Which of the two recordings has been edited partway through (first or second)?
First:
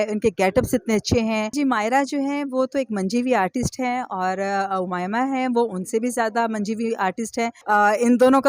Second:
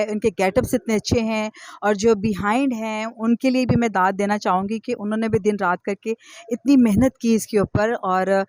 first